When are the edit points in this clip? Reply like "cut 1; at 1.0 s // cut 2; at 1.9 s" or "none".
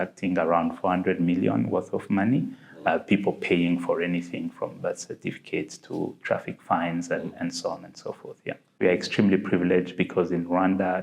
cut 1; at 8.8 s